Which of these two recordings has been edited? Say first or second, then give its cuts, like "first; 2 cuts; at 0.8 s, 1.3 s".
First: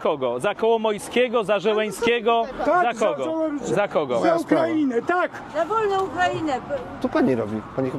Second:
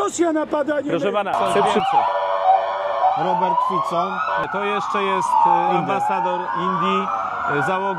second; 2 cuts; at 1.6 s, 4.4 s